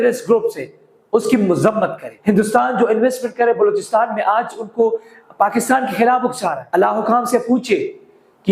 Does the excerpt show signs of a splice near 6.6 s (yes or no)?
yes